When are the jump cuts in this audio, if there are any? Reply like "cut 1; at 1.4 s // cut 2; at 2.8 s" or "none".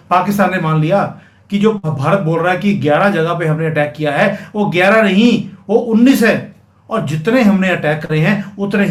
none